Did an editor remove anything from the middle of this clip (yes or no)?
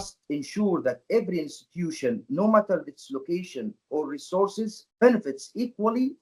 no